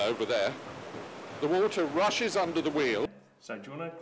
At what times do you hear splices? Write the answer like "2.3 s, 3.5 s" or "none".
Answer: 3.1 s